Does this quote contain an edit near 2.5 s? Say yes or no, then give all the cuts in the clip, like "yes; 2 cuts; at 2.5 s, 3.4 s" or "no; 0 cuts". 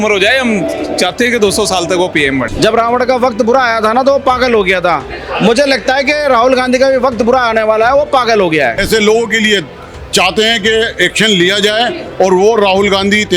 yes; 2 cuts; at 2.5 s, 8.8 s